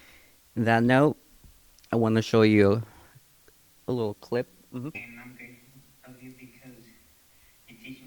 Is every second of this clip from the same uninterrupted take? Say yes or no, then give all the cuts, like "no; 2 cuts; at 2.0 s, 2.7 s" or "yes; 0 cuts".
no; 1 cut; at 5.0 s